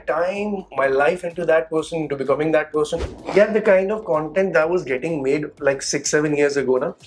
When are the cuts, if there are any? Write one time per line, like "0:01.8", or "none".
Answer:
0:03.1